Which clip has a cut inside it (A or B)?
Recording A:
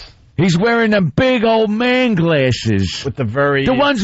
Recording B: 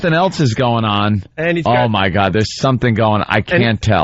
A